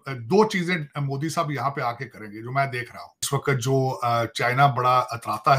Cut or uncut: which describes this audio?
cut